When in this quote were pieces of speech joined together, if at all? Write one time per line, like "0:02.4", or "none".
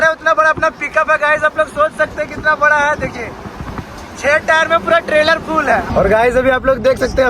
0:05.9